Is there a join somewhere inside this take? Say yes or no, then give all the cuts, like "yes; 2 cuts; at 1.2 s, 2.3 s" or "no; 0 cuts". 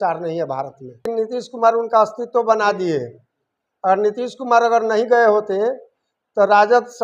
yes; 1 cut; at 1.0 s